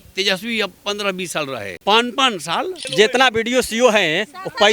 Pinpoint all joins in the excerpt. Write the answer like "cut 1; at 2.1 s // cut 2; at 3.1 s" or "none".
cut 1; at 1.7 s // cut 2; at 2.8 s